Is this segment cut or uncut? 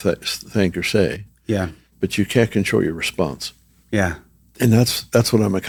uncut